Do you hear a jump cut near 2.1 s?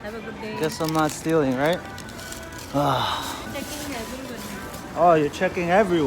no; 1 cut; at 3.5 s

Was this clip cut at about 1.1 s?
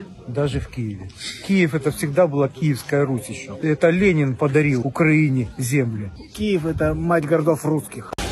no; 0 cuts

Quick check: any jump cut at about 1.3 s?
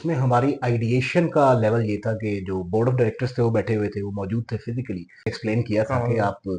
no; 1 cut; at 5.4 s

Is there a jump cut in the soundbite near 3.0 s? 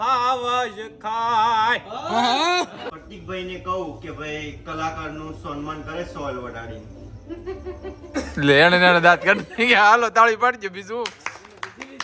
yes; 1 cut; at 3.0 s

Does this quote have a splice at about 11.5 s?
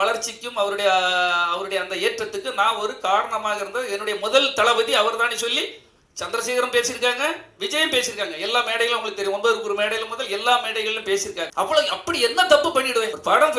yes; 1 cut; at 11.5 s

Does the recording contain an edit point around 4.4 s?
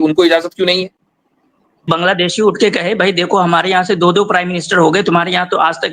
no; 1 cut; at 1.8 s

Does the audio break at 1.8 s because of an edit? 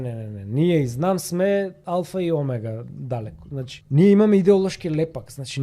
yes; 2 cuts; at 1.8 s, 3.8 s

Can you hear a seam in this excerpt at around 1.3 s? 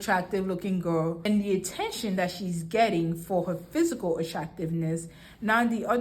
yes; 1 cut; at 1.3 s

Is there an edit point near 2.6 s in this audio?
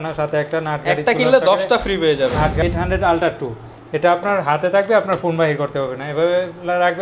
yes; 1 cut; at 2.6 s

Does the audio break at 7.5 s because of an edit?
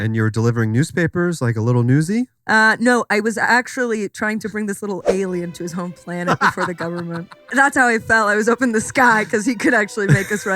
yes; 1 cut; at 7.5 s

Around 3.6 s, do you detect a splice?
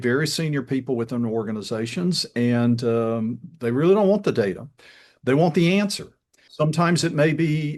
no; 1 cut; at 6.5 s

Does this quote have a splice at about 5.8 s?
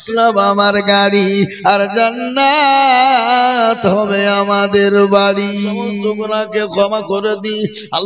yes; 1 cut; at 5.8 s

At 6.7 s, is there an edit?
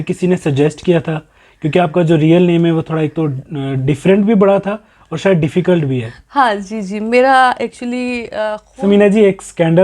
no; 1 cut; at 8.3 s

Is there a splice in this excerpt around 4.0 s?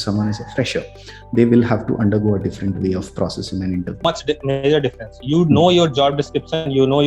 yes; 1 cut; at 4.0 s

